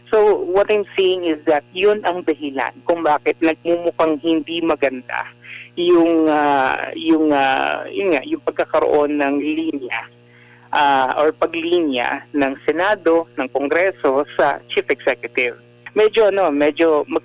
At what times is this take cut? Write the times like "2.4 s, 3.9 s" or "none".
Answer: 15.8 s